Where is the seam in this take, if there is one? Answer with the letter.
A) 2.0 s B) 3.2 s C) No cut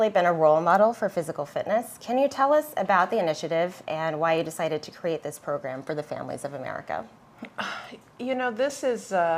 C